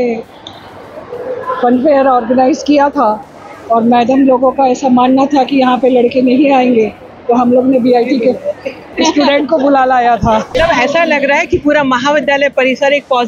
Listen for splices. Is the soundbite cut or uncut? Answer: cut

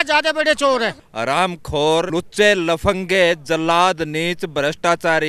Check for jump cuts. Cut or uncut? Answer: cut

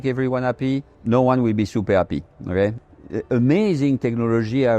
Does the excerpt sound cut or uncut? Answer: cut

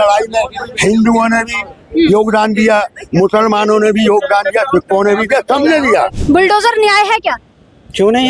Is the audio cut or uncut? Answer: cut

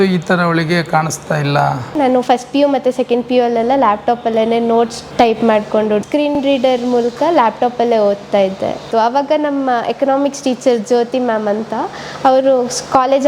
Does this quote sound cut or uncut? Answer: cut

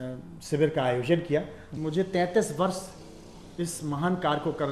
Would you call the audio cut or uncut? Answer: cut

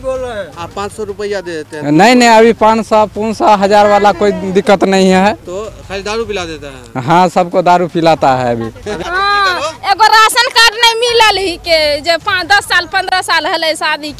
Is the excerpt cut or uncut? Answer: cut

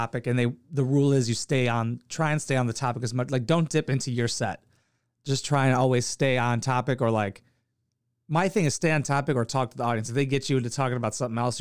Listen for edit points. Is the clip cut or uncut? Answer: uncut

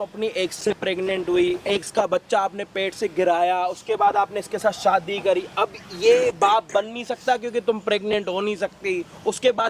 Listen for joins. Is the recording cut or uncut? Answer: uncut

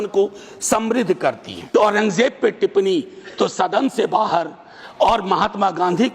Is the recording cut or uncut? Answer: cut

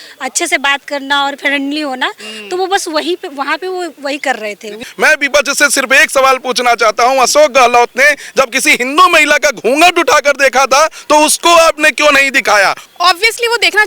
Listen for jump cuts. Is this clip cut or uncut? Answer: cut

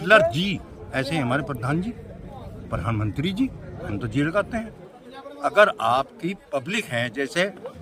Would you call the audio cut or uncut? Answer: uncut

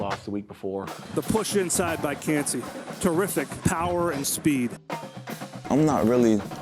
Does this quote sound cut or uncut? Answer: cut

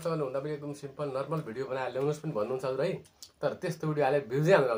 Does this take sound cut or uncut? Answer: uncut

